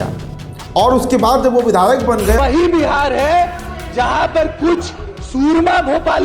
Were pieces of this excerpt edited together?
yes; 1 cut; at 2.4 s

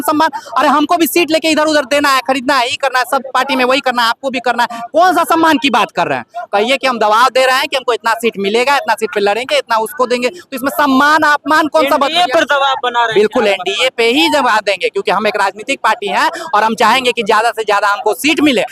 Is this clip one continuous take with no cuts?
yes; 0 cuts

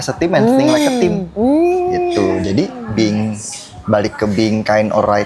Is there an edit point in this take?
no; 0 cuts

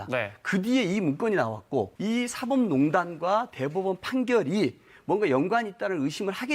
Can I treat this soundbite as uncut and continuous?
no; 1 cut; at 1.9 s

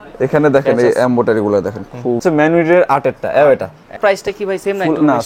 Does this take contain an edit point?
yes; 2 cuts; at 2.2 s, 4.0 s

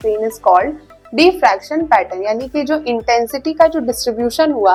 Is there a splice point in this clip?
no; 0 cuts

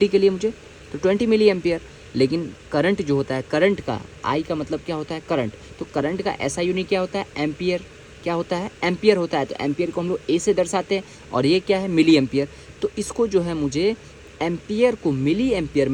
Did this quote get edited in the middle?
no; 0 cuts

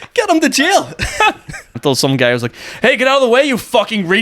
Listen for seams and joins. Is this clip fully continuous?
no; 1 cut; at 1.8 s

